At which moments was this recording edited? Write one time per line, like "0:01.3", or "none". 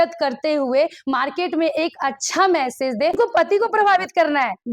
0:03.2